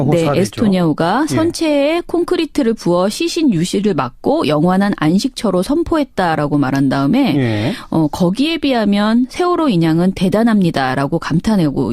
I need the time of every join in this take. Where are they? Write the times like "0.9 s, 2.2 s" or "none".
1.2 s

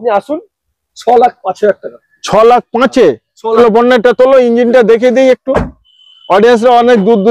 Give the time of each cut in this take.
3.6 s

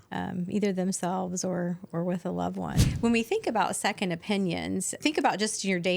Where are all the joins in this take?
2.9 s, 5.0 s

